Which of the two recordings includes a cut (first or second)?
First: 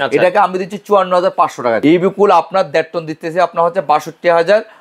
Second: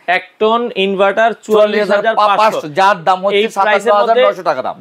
first